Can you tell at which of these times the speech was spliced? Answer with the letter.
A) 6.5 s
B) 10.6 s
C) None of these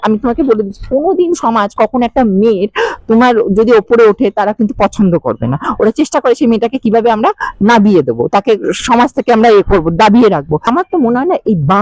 B